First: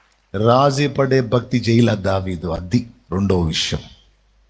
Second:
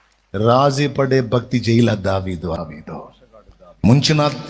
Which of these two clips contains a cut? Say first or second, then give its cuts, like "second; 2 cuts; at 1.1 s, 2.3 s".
second; 1 cut; at 2.6 s